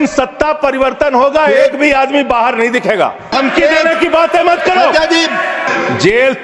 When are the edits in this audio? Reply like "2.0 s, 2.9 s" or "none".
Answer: 3.3 s, 5.7 s